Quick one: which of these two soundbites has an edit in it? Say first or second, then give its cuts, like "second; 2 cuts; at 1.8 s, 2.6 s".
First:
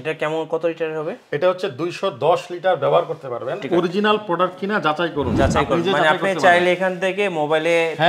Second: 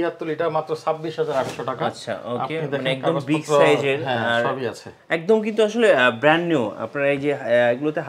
first; 1 cut; at 3.6 s